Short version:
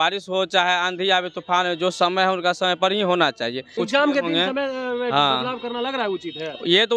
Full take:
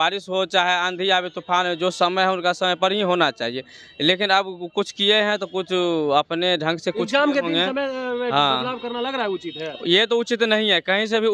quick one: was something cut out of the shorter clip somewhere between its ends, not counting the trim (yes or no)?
yes